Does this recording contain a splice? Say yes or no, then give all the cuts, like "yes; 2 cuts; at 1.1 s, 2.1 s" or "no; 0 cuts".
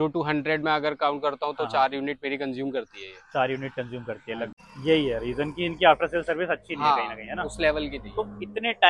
yes; 1 cut; at 4.5 s